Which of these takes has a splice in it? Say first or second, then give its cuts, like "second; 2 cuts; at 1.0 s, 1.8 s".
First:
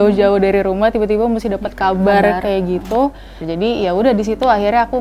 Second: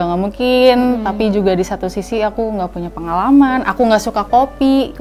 first; 1 cut; at 3.4 s